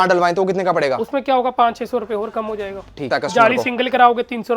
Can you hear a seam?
yes; 1 cut; at 3.0 s

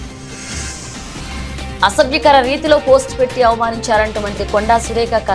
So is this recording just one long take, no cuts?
no; 1 cut; at 1.5 s

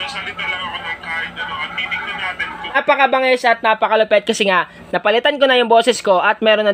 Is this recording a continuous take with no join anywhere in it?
no; 1 cut; at 2.8 s

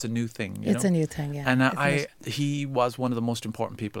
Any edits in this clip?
yes; 1 cut; at 2.2 s

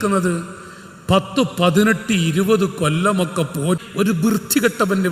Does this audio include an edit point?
yes; 1 cut; at 3.8 s

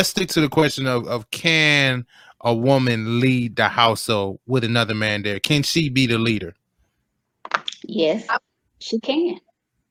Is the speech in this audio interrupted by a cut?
no; 0 cuts

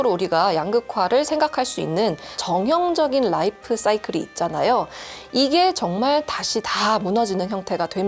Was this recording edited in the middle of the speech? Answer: yes; 1 cut; at 2.3 s

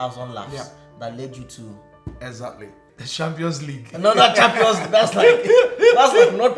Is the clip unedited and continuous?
no; 1 cut; at 2.8 s

